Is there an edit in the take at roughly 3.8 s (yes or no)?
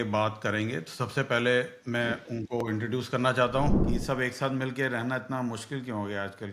yes